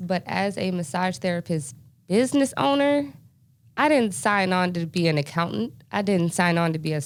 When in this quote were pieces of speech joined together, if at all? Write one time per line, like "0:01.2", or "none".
none